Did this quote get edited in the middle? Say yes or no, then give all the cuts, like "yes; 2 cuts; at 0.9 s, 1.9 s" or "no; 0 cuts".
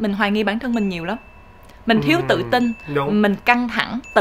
no; 0 cuts